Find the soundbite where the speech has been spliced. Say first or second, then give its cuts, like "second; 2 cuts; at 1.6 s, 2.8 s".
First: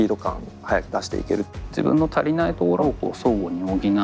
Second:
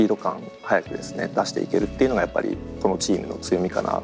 first; 2 cuts; at 1.2 s, 2.8 s